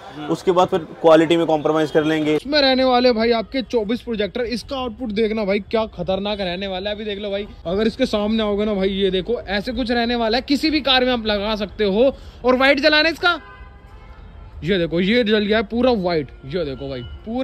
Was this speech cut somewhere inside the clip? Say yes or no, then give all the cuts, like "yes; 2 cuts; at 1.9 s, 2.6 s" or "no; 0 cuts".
yes; 2 cuts; at 2.4 s, 7.5 s